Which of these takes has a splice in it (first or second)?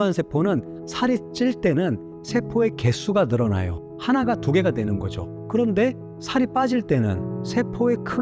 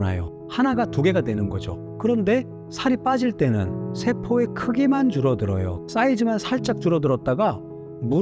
second